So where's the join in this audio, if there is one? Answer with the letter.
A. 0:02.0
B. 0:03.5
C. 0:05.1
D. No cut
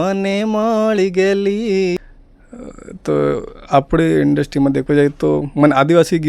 A